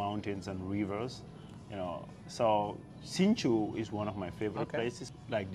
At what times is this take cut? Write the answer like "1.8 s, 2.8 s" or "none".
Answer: none